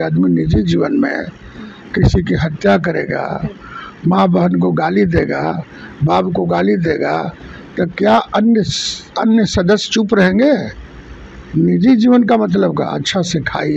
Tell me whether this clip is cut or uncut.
uncut